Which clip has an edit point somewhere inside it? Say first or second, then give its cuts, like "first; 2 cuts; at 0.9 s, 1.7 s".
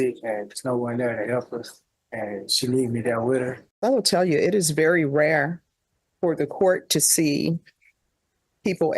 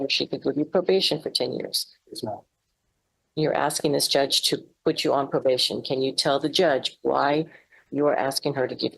first; 1 cut; at 3.6 s